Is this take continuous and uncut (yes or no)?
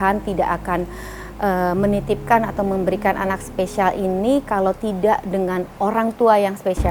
yes